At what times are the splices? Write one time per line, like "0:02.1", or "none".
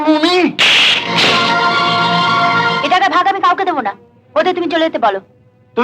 0:02.8